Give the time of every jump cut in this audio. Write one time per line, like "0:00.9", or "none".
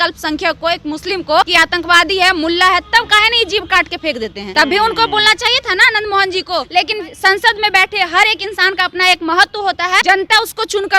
0:01.5
0:04.4
0:06.7
0:10.0